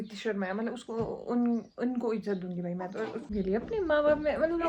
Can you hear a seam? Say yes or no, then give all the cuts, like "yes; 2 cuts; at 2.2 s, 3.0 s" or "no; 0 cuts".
yes; 1 cut; at 3.3 s